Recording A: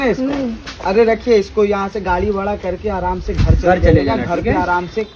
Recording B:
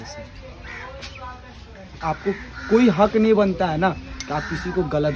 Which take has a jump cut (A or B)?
B